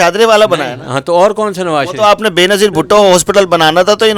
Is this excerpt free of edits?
yes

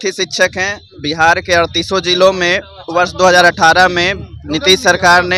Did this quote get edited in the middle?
no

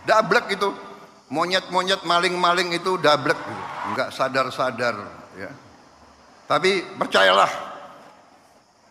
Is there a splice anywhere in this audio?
yes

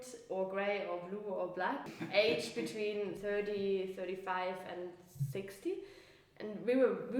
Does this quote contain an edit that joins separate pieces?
yes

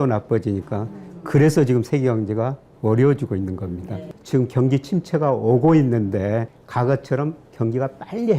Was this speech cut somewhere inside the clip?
yes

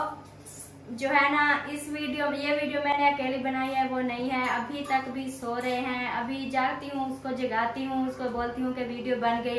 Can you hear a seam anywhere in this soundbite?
no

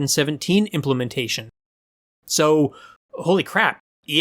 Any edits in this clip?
yes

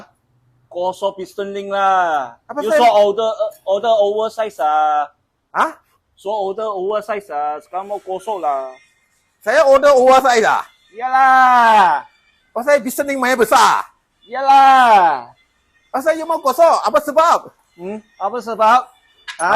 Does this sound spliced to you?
no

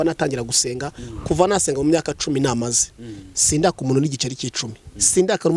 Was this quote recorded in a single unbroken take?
yes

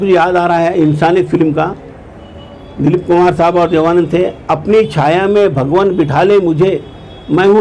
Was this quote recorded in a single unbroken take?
yes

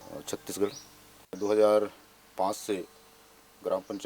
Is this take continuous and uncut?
no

